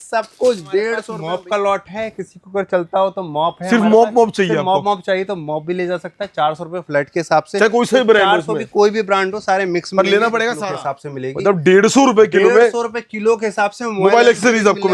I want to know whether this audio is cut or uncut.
cut